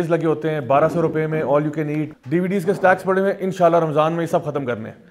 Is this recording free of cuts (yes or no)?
no